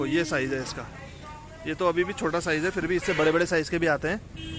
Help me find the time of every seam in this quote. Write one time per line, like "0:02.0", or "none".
none